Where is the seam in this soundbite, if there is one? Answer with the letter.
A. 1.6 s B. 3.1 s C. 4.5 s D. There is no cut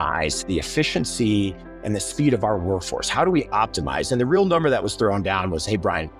D